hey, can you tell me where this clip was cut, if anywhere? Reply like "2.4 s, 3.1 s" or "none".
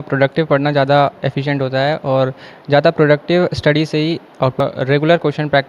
4.6 s